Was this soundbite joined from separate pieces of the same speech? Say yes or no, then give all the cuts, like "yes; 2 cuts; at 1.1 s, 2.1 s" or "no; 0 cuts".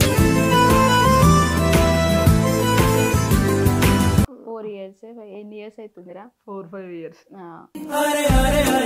yes; 1 cut; at 4.3 s